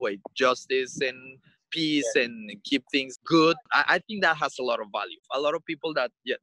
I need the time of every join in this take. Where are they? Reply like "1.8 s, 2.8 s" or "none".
3.1 s, 3.8 s, 5.2 s